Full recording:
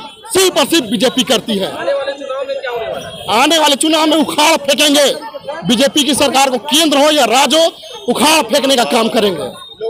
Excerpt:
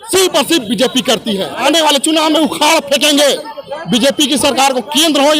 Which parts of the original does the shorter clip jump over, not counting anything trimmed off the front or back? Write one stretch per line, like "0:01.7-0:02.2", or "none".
0:01.9-0:03.4